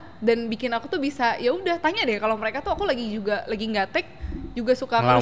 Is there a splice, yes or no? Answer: no